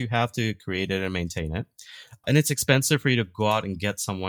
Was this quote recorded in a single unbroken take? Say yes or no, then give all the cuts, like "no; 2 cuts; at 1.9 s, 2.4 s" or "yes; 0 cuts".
no; 1 cut; at 2.2 s